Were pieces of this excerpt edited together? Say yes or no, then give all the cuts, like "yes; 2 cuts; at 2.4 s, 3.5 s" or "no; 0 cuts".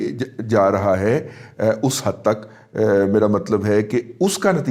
no; 0 cuts